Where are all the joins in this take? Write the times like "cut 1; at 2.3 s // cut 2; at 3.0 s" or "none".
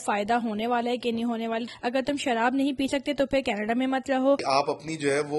cut 1; at 1.7 s // cut 2; at 4.4 s